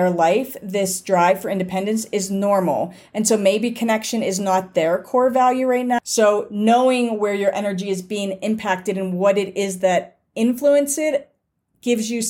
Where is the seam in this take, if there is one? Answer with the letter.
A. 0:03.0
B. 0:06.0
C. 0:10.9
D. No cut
B